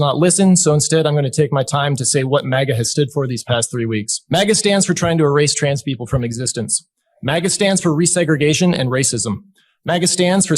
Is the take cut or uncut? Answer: cut